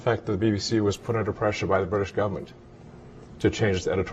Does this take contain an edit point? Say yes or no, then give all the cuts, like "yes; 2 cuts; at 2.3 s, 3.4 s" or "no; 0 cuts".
no; 0 cuts